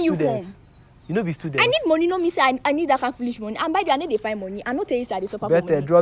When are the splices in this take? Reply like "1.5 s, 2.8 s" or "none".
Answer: none

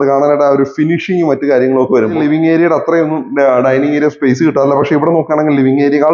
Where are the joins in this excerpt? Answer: 2.2 s

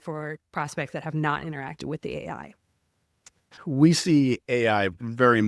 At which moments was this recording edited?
3.4 s

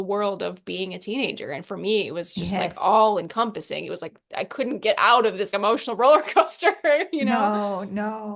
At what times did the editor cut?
none

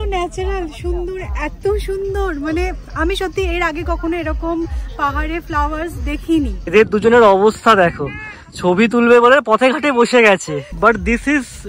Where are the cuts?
6.6 s, 10.7 s

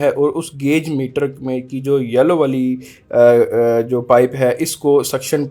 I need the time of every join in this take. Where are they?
none

